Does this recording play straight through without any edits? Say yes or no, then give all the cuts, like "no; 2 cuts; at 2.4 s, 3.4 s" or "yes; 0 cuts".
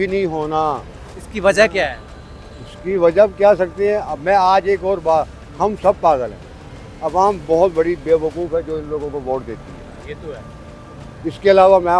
yes; 0 cuts